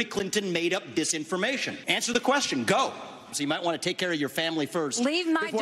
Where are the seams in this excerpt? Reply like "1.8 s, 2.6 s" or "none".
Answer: 1.7 s, 3.3 s